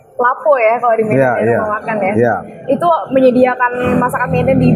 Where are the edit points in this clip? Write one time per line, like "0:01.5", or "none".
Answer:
none